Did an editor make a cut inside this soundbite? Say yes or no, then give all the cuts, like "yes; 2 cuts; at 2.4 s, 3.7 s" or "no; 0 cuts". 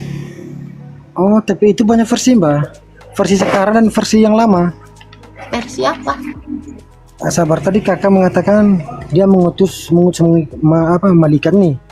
yes; 1 cut; at 6.8 s